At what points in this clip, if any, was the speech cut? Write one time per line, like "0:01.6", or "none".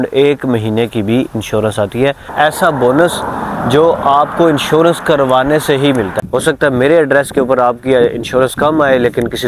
0:02.3
0:06.2